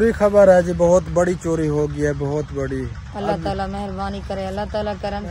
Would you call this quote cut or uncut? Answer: uncut